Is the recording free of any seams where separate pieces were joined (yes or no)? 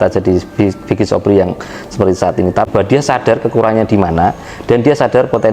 no